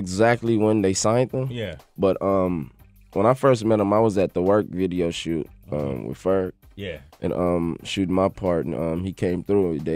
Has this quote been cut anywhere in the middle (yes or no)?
no